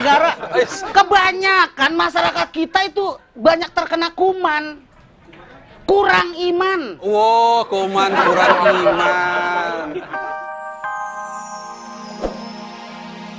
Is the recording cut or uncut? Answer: cut